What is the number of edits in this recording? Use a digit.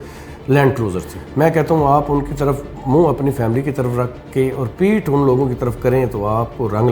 1